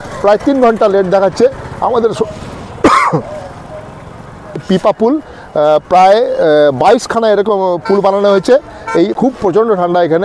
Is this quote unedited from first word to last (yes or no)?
no